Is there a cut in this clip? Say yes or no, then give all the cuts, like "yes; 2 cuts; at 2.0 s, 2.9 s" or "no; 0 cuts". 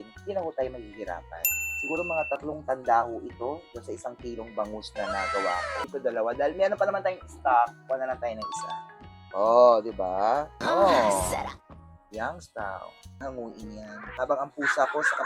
yes; 2 cuts; at 5.8 s, 13.1 s